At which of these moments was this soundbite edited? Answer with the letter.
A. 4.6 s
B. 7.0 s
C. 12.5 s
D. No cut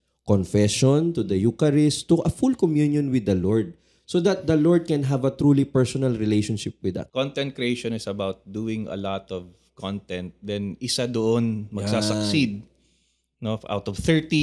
B